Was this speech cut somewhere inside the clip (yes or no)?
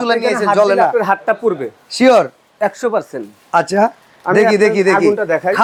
no